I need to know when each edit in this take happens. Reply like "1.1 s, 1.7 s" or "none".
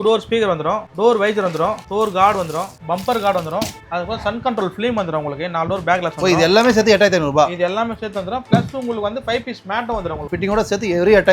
0.9 s, 1.8 s, 2.7 s, 3.8 s, 10.2 s